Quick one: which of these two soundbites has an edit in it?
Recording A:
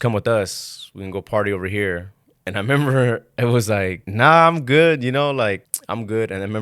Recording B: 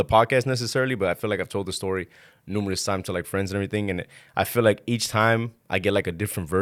A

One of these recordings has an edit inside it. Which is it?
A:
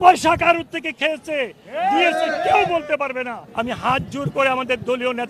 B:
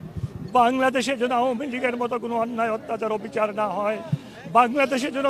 A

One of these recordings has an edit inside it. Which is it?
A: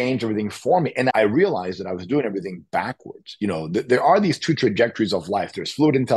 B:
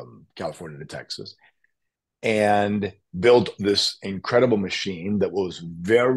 A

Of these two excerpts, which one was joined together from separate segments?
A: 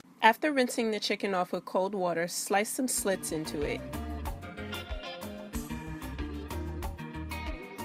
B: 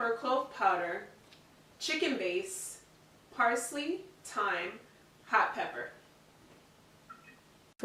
B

